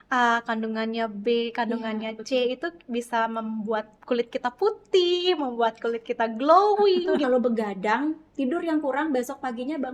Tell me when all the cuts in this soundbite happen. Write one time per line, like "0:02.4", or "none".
0:07.2